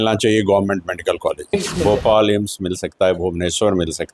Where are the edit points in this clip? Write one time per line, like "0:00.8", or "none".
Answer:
0:01.5